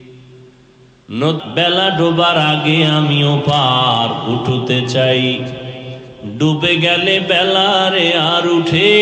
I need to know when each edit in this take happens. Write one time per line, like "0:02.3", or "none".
0:01.4